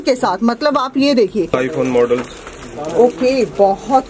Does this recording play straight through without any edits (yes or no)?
no